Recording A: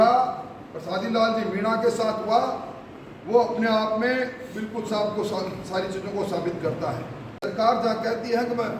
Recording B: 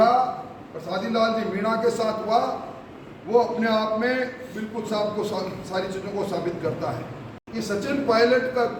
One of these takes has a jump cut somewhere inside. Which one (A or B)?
A